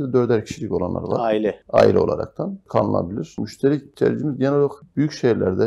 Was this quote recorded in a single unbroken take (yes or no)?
no